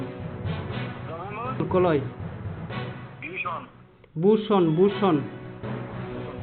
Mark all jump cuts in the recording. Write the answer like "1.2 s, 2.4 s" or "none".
5.3 s